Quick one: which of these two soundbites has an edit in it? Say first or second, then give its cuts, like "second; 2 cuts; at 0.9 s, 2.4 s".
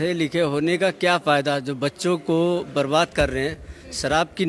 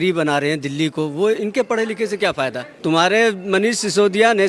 second; 1 cut; at 2.7 s